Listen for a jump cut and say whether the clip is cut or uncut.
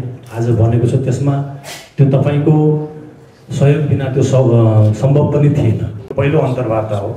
cut